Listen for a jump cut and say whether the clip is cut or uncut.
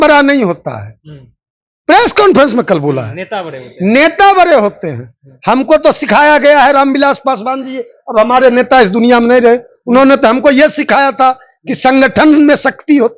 uncut